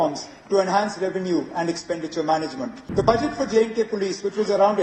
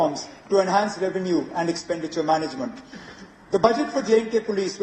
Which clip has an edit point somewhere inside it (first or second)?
first